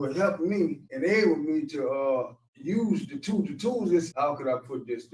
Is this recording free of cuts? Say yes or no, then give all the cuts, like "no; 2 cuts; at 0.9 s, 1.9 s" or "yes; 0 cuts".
no; 1 cut; at 4.1 s